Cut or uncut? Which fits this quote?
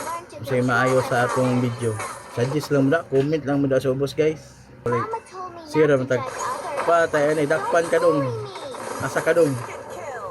cut